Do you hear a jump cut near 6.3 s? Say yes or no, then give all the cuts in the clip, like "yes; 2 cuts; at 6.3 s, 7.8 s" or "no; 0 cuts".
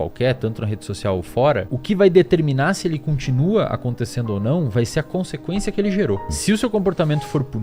yes; 2 cuts; at 1.7 s, 6.3 s